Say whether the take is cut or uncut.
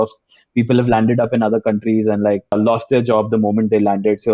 cut